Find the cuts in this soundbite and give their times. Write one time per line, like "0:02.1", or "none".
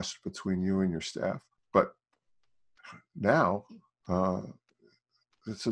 0:01.5